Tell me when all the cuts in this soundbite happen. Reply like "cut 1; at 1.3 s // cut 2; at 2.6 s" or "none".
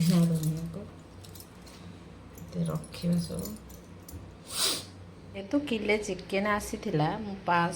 cut 1; at 5.3 s